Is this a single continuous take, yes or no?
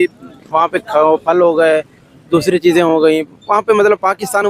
yes